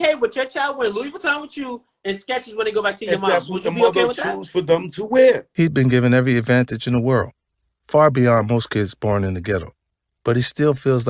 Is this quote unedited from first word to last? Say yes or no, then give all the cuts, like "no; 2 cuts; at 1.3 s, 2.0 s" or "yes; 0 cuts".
no; 1 cut; at 5.5 s